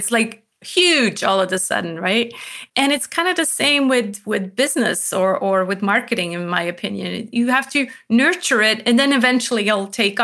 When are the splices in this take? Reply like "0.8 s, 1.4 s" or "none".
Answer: 2.6 s